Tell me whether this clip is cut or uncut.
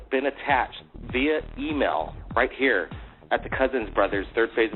uncut